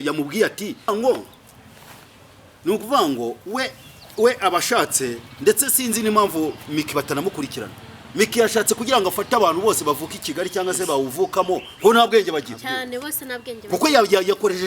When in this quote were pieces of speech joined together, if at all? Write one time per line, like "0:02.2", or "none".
0:00.9